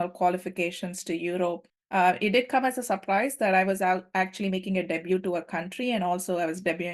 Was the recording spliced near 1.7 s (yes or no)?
yes